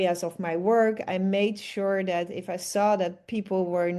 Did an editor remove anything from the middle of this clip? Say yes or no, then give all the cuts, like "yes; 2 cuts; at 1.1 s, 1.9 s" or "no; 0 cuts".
no; 0 cuts